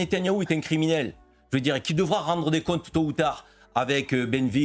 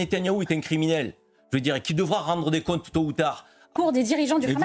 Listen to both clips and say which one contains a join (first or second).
second